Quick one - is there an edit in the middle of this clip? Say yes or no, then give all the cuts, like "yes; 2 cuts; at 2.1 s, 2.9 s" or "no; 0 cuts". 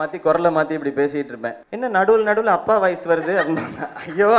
yes; 1 cut; at 1.6 s